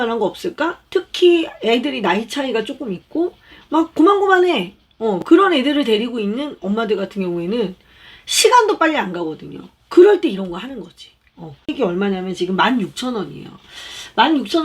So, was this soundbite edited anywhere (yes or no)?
yes